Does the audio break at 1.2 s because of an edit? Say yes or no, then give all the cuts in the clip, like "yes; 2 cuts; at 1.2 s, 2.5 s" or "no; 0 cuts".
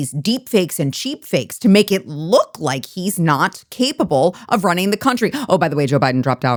no; 0 cuts